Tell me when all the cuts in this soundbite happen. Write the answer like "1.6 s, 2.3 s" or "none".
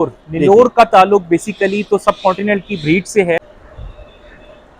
3.4 s

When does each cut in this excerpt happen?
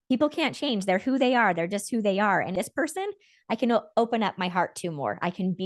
2.5 s

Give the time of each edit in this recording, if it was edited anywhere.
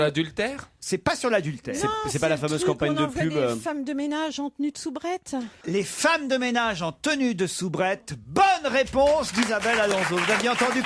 none

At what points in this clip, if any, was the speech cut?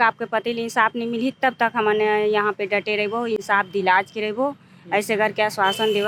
none

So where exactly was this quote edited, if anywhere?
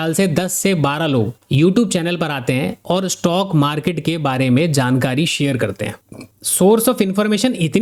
none

